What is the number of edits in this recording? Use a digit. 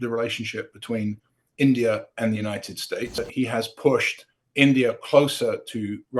1